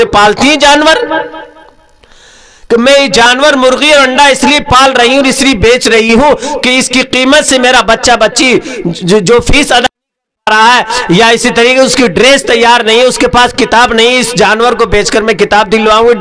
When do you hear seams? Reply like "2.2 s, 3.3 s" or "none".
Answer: none